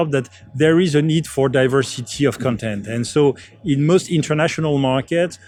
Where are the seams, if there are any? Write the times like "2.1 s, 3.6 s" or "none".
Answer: none